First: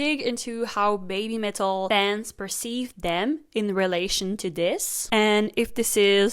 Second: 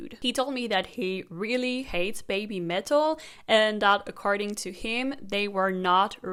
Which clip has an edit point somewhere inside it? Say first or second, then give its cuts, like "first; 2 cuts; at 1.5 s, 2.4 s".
first; 1 cut; at 1.9 s